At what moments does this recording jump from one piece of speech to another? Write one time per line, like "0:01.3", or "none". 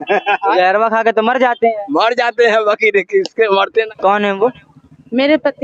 0:03.9